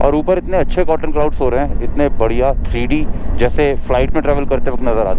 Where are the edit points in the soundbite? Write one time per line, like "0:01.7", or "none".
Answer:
none

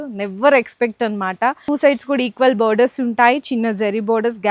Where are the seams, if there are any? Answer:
0:01.6

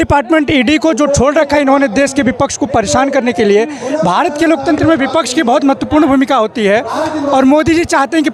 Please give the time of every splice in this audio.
none

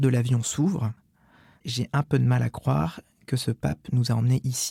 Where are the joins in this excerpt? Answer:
none

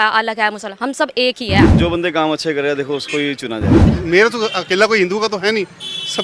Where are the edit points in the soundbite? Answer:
0:01.7
0:03.8

